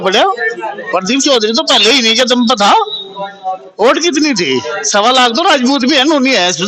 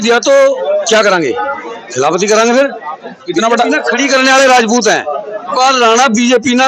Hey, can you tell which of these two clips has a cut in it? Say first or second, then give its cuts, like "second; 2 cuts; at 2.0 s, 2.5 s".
second; 1 cut; at 5.5 s